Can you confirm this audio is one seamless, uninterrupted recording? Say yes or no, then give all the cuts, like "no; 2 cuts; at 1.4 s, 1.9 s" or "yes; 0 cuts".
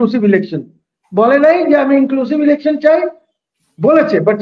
yes; 0 cuts